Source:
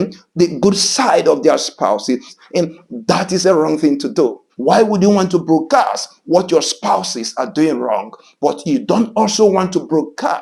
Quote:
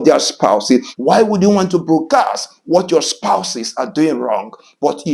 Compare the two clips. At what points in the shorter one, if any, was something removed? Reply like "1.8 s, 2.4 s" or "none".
0.9 s